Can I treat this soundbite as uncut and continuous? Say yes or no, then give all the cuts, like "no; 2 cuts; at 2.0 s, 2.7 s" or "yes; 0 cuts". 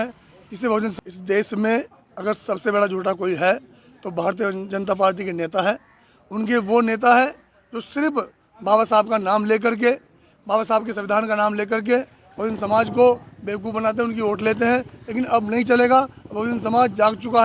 no; 1 cut; at 0.9 s